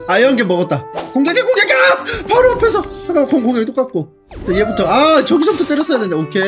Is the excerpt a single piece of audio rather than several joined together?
no; 1 cut; at 1.0 s

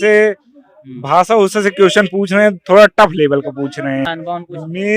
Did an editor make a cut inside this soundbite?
yes; 1 cut; at 4.1 s

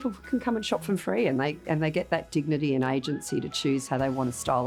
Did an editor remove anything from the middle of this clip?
no; 0 cuts

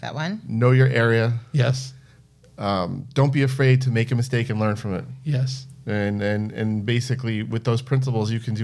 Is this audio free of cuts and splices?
yes; 0 cuts

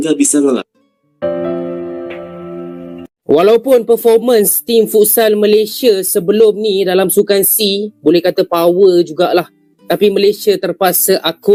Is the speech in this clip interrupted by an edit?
no; 0 cuts

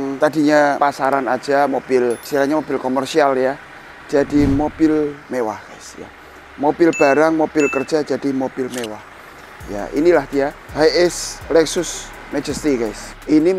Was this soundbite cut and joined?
no; 0 cuts

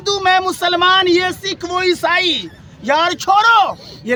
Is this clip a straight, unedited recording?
yes; 0 cuts

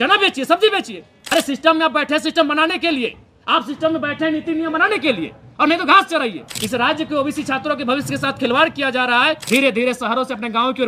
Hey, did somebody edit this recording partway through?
yes; 3 cuts; at 1.1 s, 6.5 s, 9.4 s

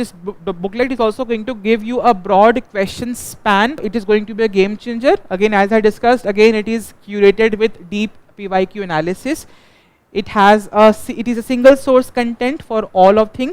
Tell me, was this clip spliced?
yes; 1 cut; at 3.9 s

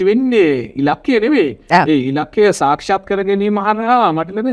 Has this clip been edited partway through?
no; 0 cuts

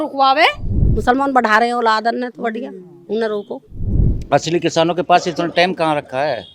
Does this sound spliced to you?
yes; 2 cuts; at 1.0 s, 3.8 s

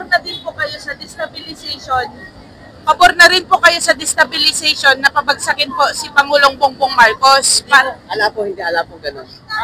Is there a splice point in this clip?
no; 0 cuts

